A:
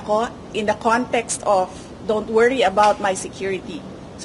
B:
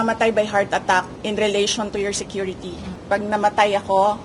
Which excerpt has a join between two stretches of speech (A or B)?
B